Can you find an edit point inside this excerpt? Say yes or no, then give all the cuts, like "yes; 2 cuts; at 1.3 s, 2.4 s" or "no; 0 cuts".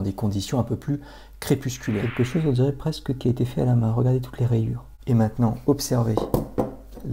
yes; 2 cuts; at 2.1 s, 4.9 s